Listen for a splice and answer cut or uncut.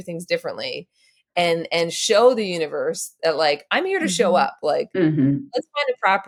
uncut